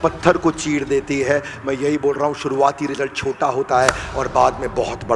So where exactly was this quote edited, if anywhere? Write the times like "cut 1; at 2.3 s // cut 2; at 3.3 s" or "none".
none

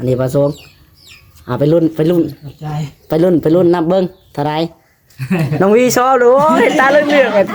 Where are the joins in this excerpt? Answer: none

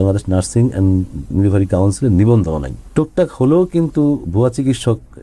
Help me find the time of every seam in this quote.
cut 1; at 2.8 s

